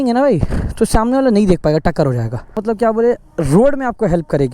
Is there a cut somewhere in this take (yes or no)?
yes